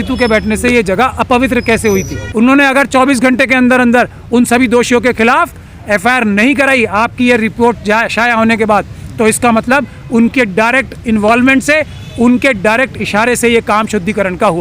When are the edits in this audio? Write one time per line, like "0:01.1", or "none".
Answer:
0:02.2